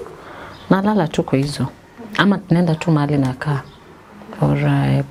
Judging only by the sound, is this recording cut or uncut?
uncut